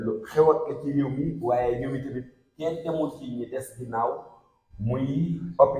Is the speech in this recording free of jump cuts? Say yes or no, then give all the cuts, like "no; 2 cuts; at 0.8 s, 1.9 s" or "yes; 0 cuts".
yes; 0 cuts